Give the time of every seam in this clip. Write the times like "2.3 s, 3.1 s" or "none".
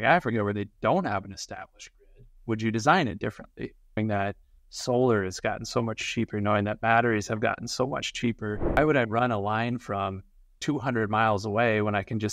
4.0 s, 8.8 s